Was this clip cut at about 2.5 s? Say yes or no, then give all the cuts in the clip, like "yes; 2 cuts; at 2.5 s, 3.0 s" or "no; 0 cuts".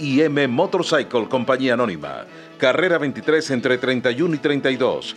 no; 0 cuts